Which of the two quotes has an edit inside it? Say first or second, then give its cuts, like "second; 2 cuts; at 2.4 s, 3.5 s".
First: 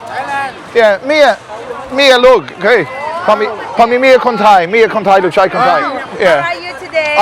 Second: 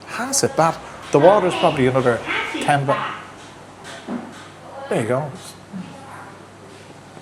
first; 1 cut; at 5.8 s